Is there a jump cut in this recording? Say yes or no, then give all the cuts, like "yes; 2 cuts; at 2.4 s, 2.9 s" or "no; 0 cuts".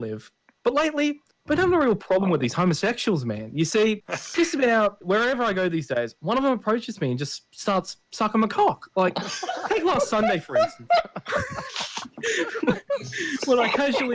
yes; 2 cuts; at 4.1 s, 5.0 s